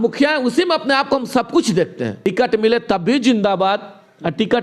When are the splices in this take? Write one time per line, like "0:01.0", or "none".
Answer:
0:02.2